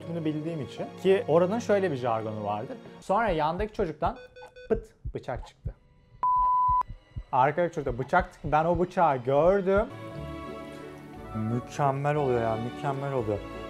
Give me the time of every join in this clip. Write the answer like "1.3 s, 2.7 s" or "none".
3.0 s, 9.9 s

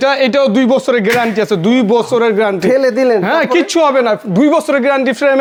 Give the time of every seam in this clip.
none

